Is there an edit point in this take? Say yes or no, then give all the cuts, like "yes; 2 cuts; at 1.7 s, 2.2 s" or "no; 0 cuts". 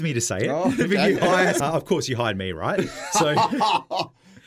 yes; 1 cut; at 1.6 s